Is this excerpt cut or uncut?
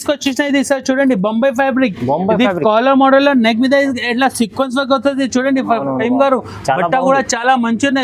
uncut